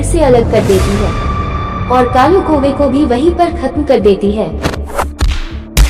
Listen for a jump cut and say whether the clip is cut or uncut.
uncut